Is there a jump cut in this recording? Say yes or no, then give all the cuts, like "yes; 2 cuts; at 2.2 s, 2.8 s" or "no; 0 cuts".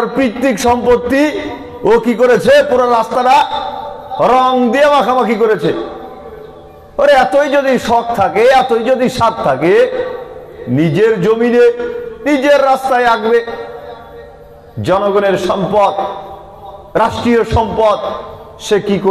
no; 0 cuts